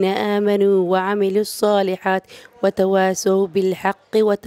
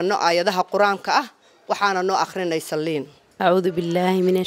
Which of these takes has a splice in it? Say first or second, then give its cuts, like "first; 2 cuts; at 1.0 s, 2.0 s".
second; 1 cut; at 3.2 s